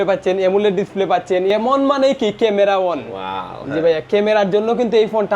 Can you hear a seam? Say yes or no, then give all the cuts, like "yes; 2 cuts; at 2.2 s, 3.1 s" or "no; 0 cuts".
yes; 1 cut; at 1.5 s